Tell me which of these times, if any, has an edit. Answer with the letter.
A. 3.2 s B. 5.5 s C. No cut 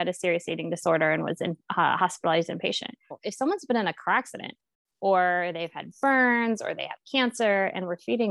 A